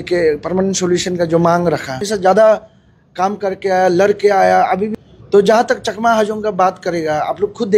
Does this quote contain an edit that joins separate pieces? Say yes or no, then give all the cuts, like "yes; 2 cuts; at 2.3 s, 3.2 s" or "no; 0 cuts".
yes; 2 cuts; at 2.1 s, 4.9 s